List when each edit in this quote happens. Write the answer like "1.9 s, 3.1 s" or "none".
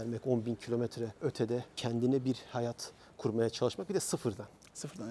none